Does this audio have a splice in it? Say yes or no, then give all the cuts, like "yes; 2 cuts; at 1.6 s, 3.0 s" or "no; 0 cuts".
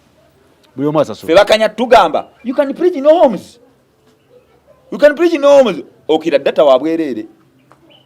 no; 0 cuts